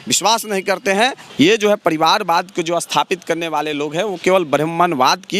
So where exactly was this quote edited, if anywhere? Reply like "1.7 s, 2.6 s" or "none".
1.2 s